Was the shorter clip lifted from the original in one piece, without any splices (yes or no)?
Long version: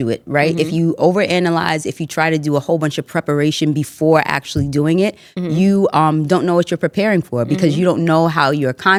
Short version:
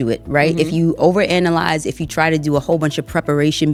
yes